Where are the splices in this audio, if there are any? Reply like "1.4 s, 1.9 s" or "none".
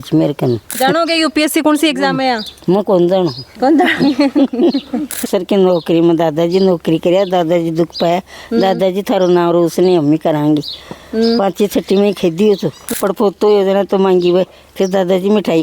0.8 s, 5.2 s, 12.9 s